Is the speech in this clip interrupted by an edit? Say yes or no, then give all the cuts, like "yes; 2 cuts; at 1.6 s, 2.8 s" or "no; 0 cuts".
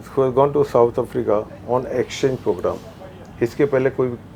no; 0 cuts